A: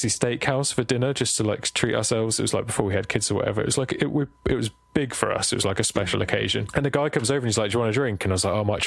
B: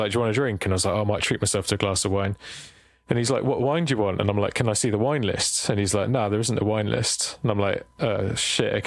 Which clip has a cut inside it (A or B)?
A